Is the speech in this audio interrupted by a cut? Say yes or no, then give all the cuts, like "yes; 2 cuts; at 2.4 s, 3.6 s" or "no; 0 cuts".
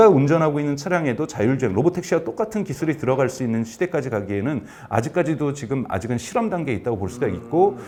no; 0 cuts